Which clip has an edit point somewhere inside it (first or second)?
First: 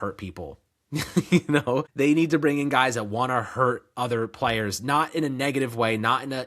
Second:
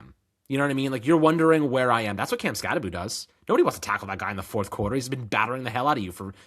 first